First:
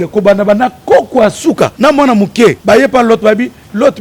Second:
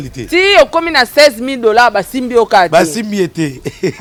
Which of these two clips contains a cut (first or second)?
first